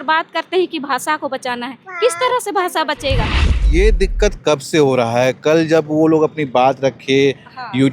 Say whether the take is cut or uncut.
cut